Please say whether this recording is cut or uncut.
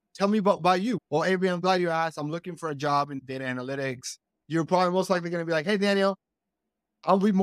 cut